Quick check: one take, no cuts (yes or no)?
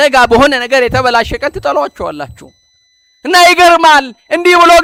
yes